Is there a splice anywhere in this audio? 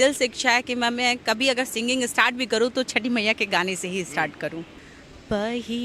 yes; 1 cut; at 4.7 s

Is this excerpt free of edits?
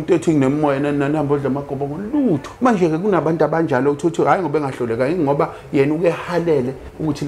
no; 1 cut; at 2.5 s

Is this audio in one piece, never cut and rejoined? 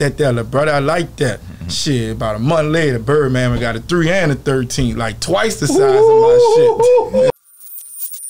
no; 1 cut; at 7.4 s

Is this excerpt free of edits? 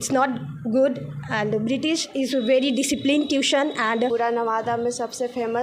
no; 1 cut; at 4.1 s

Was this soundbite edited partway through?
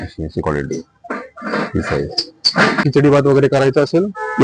yes; 1 cut; at 2.8 s

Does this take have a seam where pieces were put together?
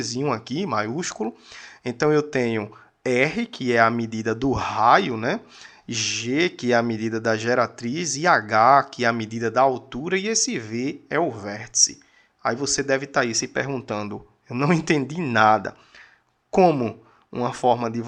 no; 0 cuts

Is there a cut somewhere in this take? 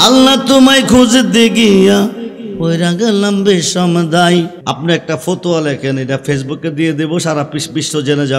yes; 1 cut; at 4.6 s

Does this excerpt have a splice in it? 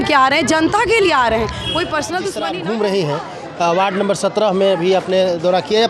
yes; 1 cut; at 2.4 s

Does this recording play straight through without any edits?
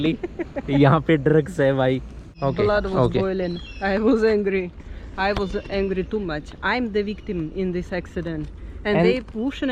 no; 1 cut; at 2.2 s

